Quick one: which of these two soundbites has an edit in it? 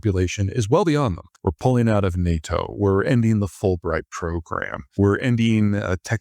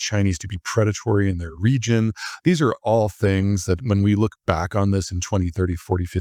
first; 2 cuts; at 1.3 s, 4.8 s

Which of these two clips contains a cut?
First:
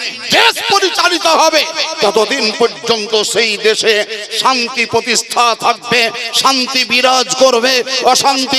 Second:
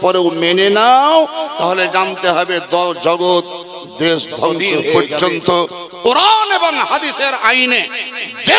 second; 1 cut; at 5.1 s

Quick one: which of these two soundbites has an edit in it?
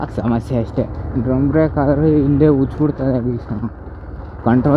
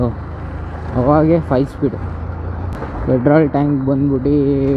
second; 1 cut; at 2.8 s

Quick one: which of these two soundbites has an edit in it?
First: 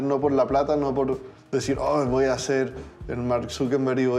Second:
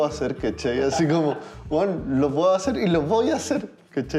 first; 1 cut; at 1.3 s

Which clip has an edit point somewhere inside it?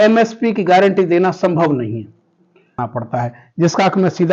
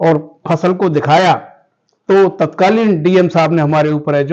first; 1 cut; at 2.8 s

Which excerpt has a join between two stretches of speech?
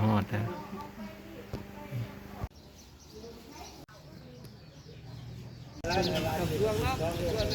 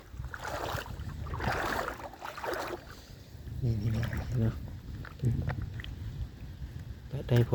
first; 3 cuts; at 2.5 s, 3.9 s, 5.8 s

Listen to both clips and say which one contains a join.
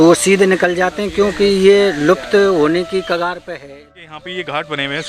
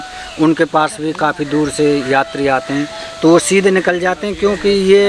first; 1 cut; at 3.6 s

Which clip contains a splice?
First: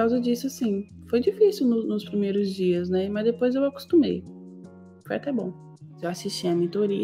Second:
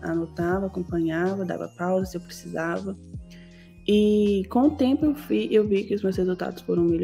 first; 1 cut; at 6.0 s

